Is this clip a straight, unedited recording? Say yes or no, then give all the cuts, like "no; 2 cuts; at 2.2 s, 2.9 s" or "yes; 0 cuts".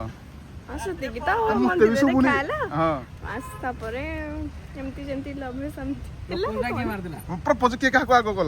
yes; 0 cuts